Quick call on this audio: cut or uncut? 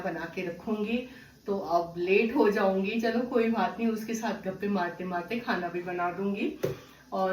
uncut